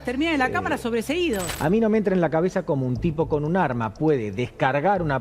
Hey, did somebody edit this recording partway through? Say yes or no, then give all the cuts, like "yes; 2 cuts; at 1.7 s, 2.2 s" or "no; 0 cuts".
yes; 1 cut; at 1.5 s